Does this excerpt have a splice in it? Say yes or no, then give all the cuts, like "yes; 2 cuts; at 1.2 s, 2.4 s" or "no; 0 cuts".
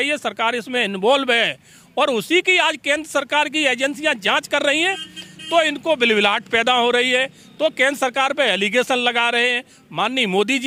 no; 0 cuts